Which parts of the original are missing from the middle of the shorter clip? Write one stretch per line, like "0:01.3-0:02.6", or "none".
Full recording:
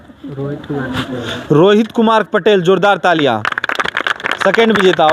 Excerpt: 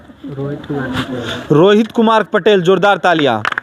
none

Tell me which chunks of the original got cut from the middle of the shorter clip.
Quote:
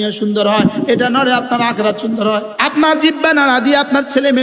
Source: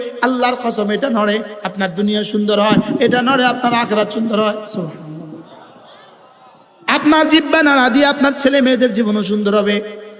0:04.6-0:06.8

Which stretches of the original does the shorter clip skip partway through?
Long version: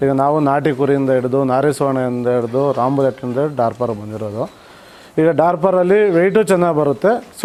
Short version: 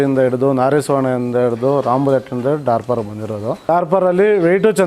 0:04.6-0:05.4

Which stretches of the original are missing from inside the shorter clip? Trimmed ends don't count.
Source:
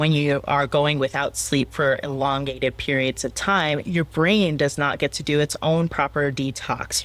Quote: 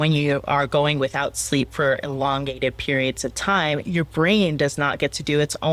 none

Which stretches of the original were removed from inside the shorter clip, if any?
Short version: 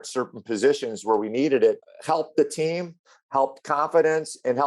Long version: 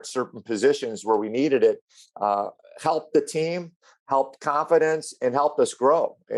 0:01.9-0:02.7

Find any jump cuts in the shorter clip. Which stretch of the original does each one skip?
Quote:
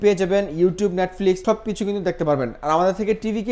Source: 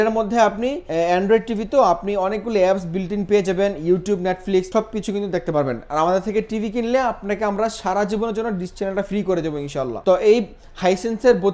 none

